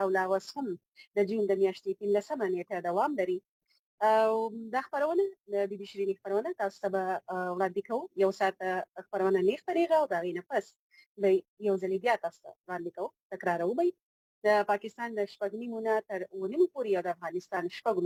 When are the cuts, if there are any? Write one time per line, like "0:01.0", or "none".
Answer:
none